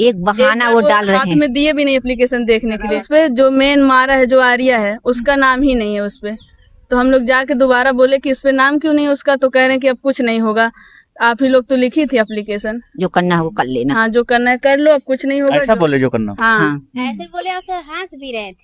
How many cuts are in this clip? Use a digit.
1